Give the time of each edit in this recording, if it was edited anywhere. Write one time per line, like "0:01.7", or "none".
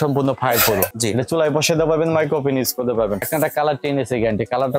0:00.9
0:03.3

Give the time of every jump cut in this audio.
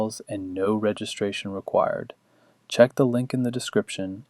0:02.9

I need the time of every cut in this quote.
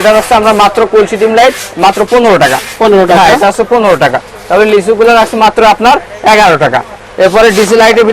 none

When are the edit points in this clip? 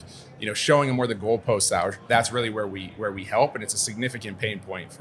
0:02.0

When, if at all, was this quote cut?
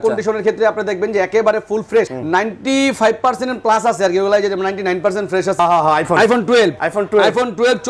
0:02.2
0:05.6
0:06.8

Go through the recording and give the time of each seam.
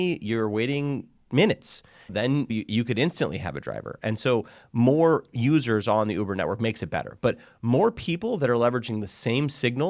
0:02.4

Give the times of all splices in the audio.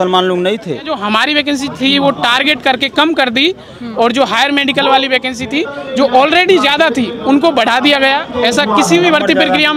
0:01.0
0:08.2

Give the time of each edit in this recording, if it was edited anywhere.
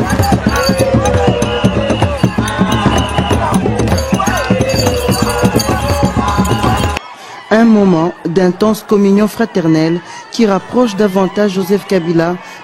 0:06.9

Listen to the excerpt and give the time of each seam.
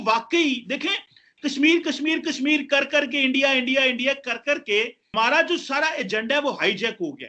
0:05.0

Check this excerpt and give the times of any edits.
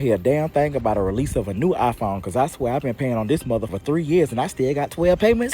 0:03.7

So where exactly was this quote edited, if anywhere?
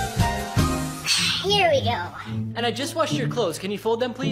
0:01.0

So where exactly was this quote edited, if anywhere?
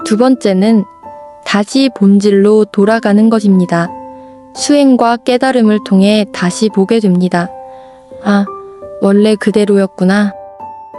none

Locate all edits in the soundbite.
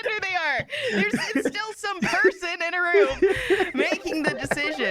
none

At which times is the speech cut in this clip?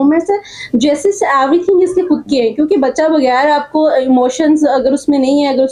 none

